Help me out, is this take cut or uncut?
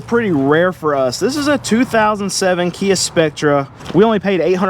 cut